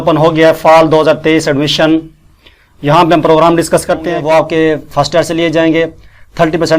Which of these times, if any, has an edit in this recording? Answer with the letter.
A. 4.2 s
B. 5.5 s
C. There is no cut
A